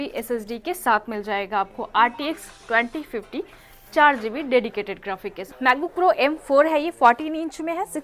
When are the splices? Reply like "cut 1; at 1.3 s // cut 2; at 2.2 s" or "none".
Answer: cut 1; at 5.3 s